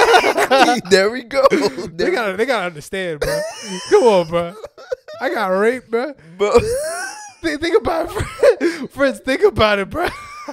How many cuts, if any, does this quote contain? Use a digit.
0